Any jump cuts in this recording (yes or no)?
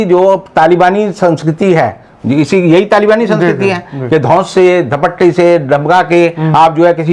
no